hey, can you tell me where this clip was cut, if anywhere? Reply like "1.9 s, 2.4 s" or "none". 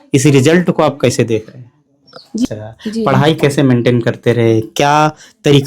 2.4 s